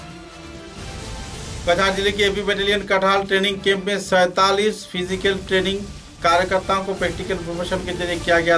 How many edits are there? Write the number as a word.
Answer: one